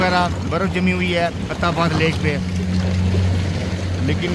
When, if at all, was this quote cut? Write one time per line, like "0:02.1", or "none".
none